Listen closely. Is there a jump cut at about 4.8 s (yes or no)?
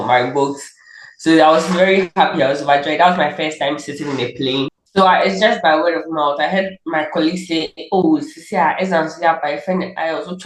yes